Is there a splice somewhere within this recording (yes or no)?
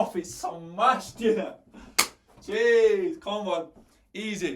no